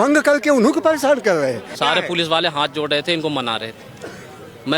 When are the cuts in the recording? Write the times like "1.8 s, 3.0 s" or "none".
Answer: 1.7 s